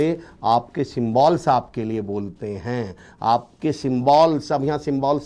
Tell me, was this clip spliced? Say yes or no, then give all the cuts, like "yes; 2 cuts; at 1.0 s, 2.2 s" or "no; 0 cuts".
no; 0 cuts